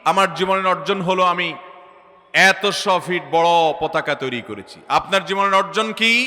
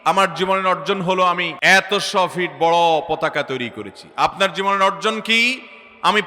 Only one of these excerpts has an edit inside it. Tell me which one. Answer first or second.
second